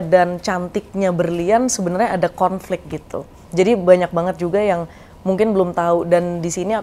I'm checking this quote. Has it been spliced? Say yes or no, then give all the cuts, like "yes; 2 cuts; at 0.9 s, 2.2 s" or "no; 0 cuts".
no; 0 cuts